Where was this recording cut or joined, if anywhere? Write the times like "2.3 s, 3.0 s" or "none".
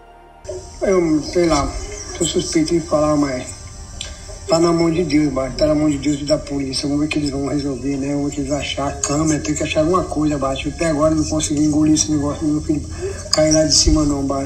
none